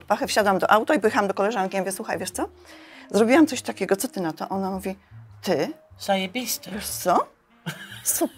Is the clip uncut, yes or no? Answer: yes